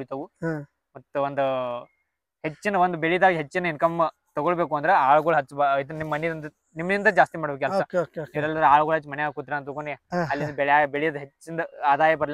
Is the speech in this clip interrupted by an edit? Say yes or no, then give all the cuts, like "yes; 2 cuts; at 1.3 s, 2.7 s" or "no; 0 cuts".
no; 0 cuts